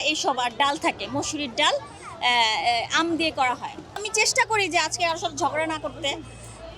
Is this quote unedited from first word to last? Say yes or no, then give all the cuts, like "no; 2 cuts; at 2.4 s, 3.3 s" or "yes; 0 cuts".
no; 1 cut; at 3.9 s